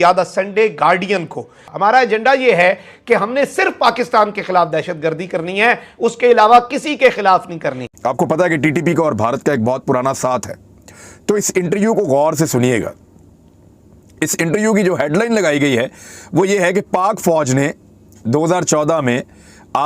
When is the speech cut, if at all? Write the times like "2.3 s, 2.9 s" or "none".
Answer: 1.6 s, 8.0 s